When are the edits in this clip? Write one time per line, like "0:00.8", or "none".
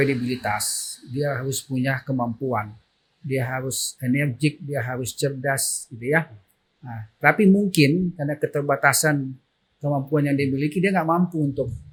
none